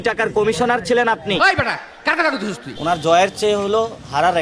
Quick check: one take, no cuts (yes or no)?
yes